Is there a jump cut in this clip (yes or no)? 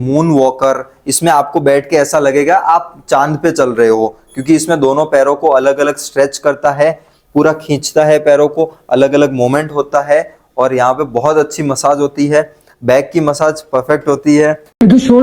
no